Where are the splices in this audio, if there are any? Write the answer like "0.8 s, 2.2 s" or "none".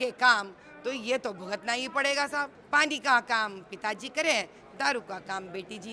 2.6 s